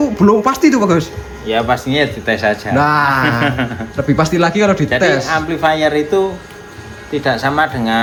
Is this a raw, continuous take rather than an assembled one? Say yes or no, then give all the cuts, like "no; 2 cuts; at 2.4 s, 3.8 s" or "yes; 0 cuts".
yes; 0 cuts